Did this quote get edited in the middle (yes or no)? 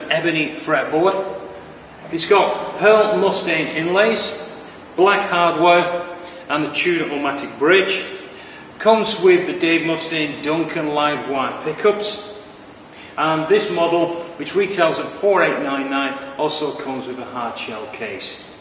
yes